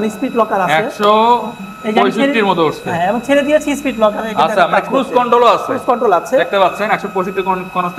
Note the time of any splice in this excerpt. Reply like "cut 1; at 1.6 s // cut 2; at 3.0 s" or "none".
none